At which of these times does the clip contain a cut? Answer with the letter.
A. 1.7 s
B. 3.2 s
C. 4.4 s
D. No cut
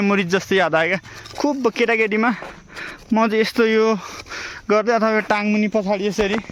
D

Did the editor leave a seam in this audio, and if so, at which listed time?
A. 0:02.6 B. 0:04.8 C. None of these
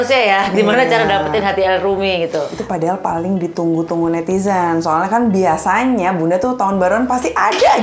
A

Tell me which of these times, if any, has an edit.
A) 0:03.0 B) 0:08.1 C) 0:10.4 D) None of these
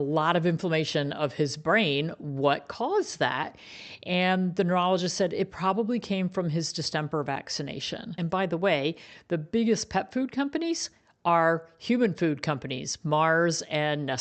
B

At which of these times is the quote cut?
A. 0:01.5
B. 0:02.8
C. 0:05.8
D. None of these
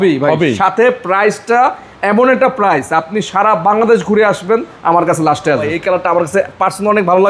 C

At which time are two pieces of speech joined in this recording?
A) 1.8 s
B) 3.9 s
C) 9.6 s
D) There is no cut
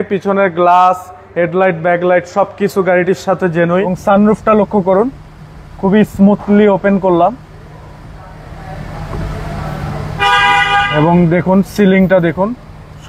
B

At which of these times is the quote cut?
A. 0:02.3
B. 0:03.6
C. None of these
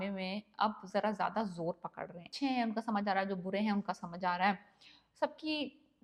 A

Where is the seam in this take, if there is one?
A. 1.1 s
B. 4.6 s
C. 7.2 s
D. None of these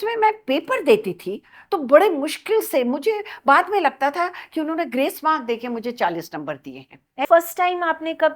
C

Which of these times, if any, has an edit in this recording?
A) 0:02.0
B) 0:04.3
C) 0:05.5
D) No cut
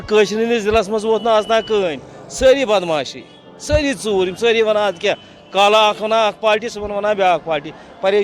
D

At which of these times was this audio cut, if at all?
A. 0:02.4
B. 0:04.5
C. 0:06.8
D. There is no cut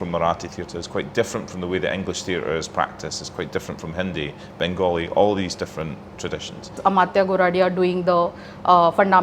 C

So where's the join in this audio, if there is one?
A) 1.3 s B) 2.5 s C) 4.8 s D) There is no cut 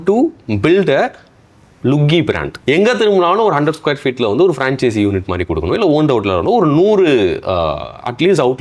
B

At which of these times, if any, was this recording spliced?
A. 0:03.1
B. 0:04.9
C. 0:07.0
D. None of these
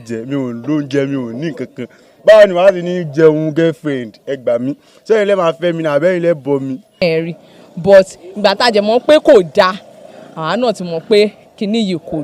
C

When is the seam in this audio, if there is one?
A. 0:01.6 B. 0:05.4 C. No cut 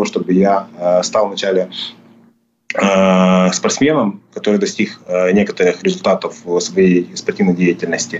C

